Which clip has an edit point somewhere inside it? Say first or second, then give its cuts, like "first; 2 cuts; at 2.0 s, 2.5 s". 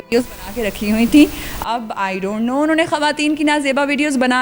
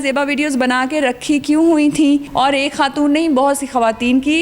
second; 1 cut; at 2.3 s